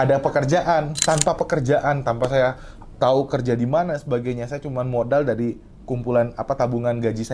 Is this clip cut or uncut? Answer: cut